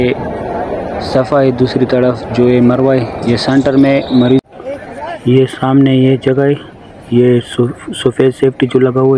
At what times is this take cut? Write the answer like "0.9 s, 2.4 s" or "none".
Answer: 4.4 s